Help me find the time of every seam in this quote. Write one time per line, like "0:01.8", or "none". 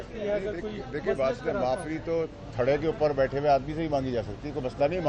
none